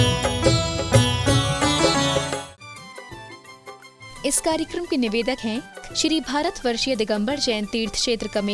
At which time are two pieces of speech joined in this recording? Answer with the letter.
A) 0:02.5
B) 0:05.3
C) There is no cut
A